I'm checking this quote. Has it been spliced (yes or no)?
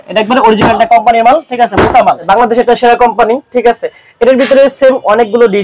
yes